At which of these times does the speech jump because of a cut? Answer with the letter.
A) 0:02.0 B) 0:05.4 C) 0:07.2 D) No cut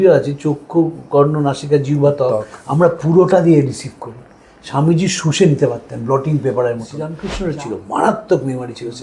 C